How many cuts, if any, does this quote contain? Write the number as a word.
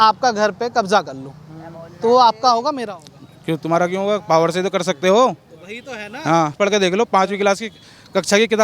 one